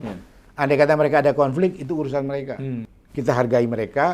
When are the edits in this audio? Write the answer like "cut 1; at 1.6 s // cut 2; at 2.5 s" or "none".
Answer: cut 1; at 3.0 s